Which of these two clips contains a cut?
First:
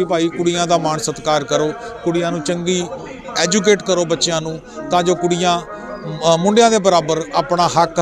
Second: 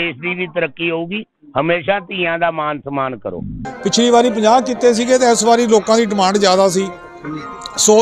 second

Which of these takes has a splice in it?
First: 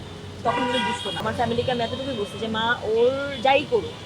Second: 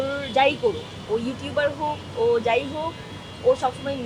first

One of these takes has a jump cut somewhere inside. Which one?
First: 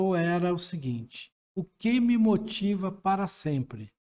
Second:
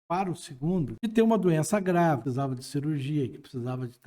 second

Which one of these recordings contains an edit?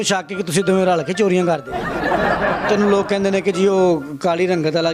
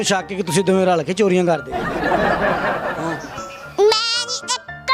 first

